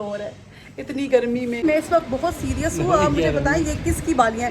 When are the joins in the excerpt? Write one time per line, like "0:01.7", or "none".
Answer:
0:01.6